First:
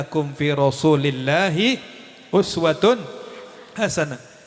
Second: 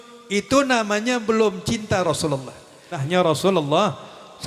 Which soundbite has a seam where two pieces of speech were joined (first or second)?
second